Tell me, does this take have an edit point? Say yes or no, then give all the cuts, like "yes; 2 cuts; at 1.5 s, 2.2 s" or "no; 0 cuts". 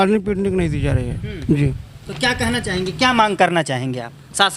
no; 0 cuts